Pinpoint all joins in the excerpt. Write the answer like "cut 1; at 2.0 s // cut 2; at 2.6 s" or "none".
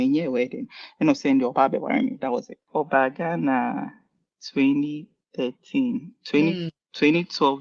cut 1; at 2.6 s

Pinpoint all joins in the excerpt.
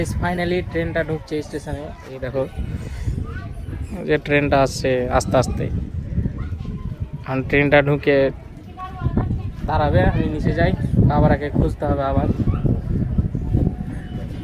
none

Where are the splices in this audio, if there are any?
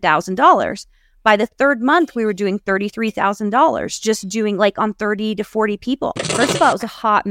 cut 1; at 6.3 s

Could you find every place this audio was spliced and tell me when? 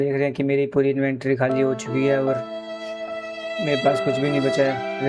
none

